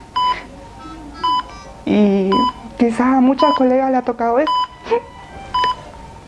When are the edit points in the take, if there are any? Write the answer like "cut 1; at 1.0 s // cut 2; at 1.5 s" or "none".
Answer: none